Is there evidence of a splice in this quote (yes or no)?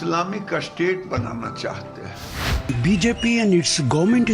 yes